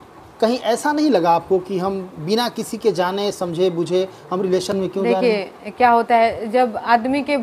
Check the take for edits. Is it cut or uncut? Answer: uncut